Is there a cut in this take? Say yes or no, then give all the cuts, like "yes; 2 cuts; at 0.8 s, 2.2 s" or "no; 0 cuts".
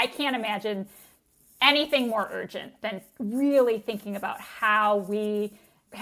no; 0 cuts